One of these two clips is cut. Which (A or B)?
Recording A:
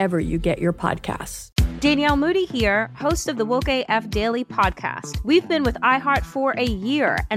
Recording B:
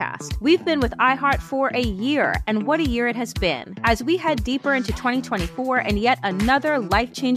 A